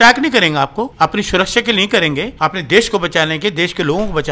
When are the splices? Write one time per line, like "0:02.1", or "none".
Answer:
0:00.9
0:02.3